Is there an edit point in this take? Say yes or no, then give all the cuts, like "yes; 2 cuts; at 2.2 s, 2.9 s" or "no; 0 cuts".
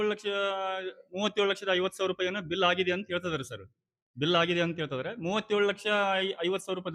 no; 0 cuts